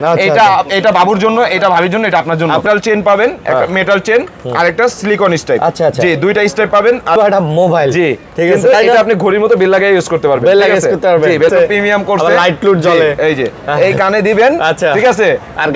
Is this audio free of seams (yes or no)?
no